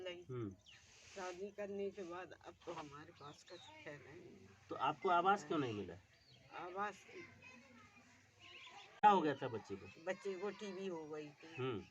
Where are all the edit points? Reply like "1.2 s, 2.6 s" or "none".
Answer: 9.0 s